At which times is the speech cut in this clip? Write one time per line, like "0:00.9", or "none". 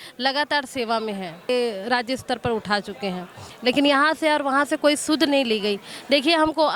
0:01.5